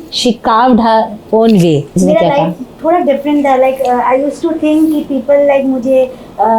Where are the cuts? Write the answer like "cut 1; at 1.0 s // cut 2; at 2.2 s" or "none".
cut 1; at 2.0 s